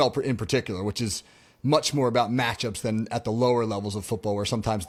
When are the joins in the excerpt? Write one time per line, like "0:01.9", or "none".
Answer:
none